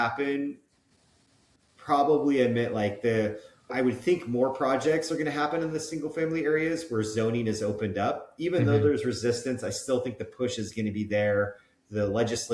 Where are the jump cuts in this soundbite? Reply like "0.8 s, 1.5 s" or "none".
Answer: 3.7 s